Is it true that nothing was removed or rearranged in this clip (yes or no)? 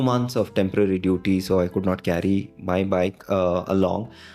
yes